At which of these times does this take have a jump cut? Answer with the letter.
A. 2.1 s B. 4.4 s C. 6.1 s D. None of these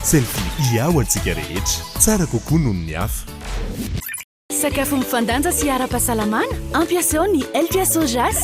B